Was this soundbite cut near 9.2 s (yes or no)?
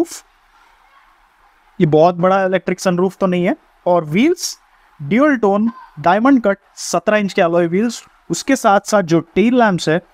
no